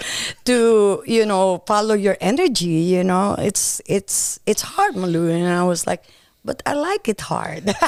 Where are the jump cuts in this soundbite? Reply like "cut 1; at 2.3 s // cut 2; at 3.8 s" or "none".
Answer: none

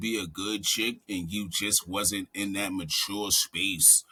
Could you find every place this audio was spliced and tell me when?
none

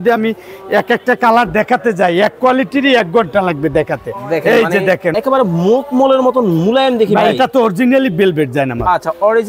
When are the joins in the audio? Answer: cut 1; at 5.1 s

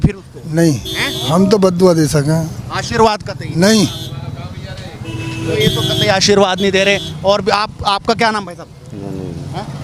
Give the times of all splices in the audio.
none

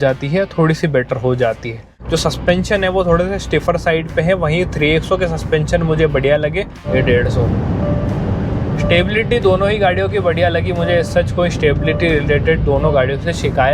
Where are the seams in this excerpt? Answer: cut 1; at 1.9 s // cut 2; at 6.8 s

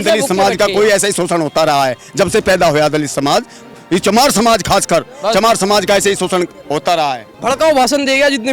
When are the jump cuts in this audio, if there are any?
cut 1; at 7.3 s

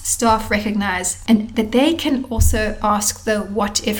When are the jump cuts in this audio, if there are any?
cut 1; at 1.1 s

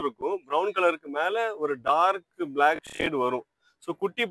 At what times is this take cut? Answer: none

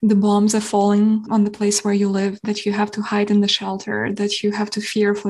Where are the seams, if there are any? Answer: none

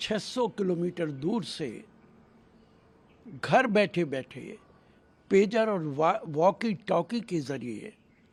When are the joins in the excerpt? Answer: none

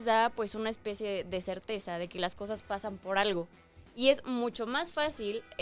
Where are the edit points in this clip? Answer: none

